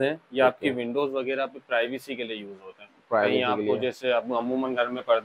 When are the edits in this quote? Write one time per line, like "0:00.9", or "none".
none